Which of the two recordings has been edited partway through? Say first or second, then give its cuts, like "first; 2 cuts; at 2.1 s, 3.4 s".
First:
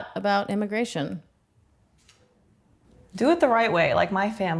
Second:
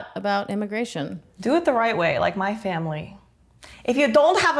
second; 1 cut; at 1.2 s